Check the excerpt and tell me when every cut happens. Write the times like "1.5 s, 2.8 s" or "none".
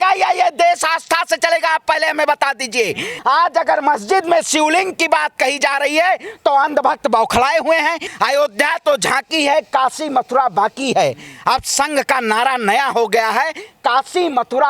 3.1 s, 8.1 s